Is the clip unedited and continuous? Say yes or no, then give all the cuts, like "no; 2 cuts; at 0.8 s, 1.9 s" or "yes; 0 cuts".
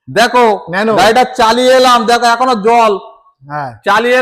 yes; 0 cuts